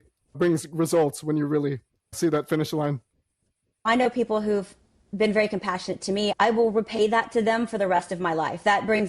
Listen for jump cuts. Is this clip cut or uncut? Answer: cut